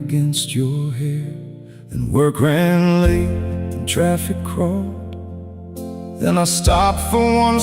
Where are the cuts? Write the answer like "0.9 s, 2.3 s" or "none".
3.9 s

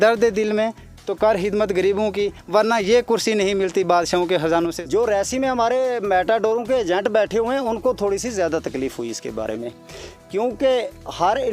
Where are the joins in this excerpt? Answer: 4.8 s

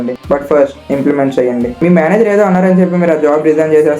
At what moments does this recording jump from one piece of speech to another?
1.7 s

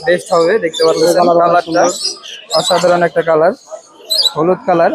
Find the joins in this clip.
none

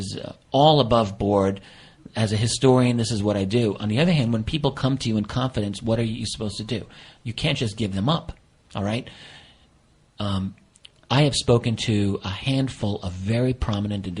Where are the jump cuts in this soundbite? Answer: none

